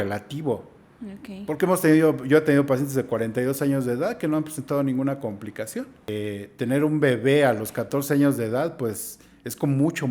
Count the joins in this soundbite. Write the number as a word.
one